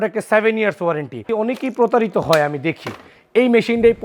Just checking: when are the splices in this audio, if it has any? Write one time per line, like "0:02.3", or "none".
0:01.2